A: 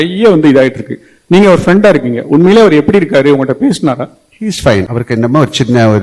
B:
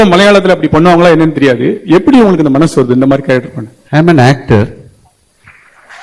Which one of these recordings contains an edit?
A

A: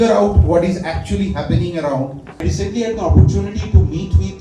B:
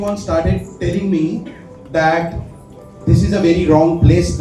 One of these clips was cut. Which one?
A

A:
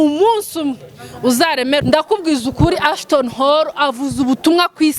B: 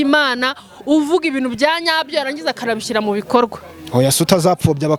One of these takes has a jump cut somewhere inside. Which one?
A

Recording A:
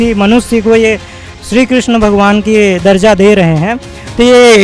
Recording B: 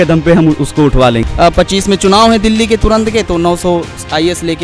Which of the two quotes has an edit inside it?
B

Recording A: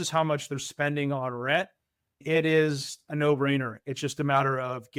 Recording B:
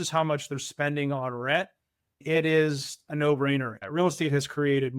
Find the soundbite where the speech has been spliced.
B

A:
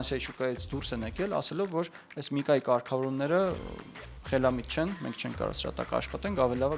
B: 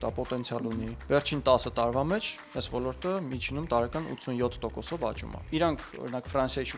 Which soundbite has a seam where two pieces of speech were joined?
B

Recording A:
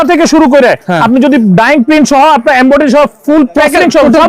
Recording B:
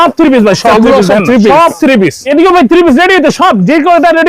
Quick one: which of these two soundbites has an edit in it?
B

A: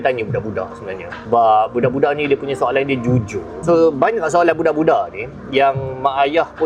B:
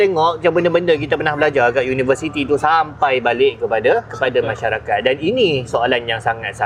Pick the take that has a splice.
A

